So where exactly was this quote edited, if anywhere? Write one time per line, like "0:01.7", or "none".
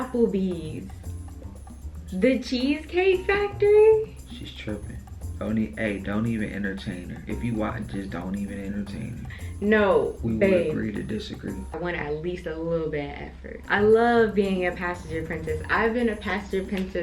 0:11.7
0:13.5